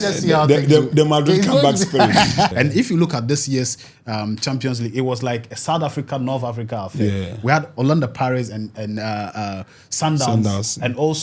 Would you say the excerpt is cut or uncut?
cut